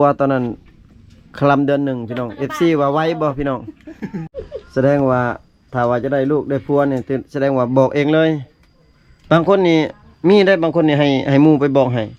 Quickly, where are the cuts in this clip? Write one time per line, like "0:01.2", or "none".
0:04.2